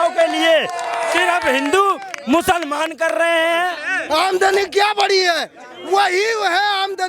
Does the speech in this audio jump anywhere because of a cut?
yes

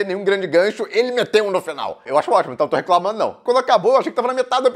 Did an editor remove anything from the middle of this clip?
yes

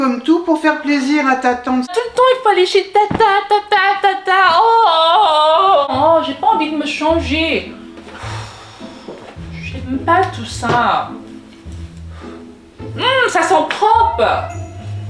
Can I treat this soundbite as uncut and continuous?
yes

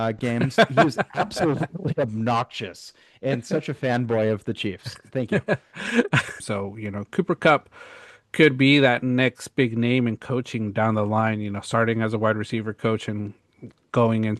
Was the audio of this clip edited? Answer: yes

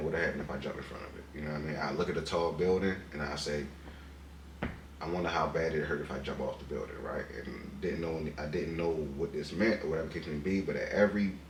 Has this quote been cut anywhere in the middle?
no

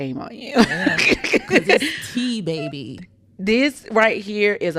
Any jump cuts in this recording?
no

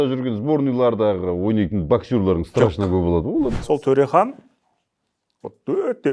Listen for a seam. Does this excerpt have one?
yes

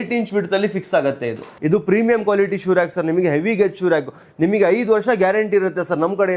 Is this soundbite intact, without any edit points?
no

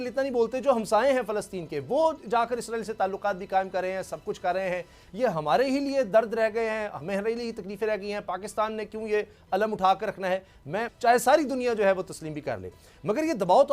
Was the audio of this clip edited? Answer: yes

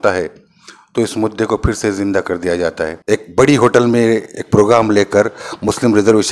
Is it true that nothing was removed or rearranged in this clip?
no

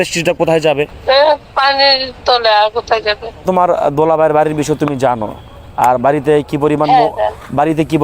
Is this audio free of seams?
no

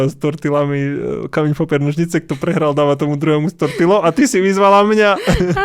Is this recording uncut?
yes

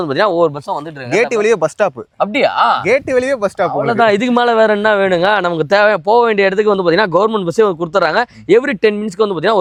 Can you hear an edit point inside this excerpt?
no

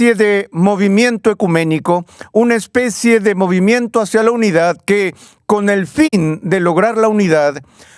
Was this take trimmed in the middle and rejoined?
no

